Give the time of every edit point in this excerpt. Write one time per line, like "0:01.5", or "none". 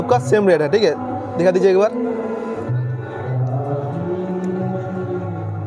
none